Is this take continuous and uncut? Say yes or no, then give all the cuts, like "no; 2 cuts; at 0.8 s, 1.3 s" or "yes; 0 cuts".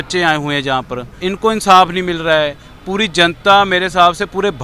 no; 1 cut; at 1.0 s